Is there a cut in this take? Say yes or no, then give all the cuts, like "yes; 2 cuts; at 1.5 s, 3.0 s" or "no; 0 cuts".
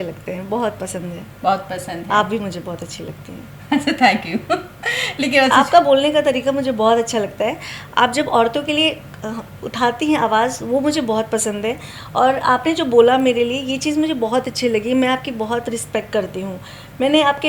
no; 0 cuts